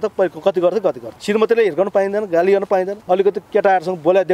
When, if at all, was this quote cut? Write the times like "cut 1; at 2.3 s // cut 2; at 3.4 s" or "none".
cut 1; at 1.1 s // cut 2; at 3.0 s